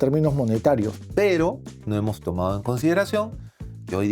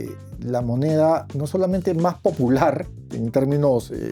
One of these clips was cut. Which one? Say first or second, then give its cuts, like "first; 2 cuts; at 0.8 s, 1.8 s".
first; 1 cut; at 1.0 s